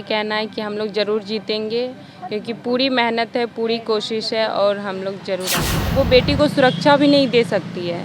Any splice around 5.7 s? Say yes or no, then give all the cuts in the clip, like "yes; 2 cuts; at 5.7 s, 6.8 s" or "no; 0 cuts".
yes; 1 cut; at 5.7 s